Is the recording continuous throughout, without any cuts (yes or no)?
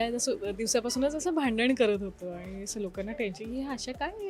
yes